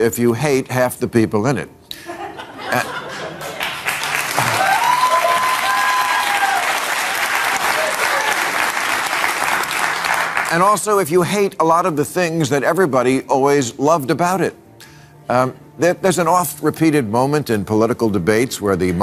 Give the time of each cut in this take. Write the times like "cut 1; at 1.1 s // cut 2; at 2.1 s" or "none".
none